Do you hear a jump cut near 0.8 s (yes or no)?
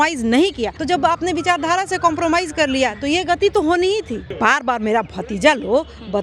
yes